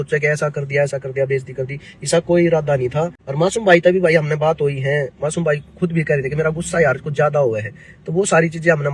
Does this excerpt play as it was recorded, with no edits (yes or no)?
no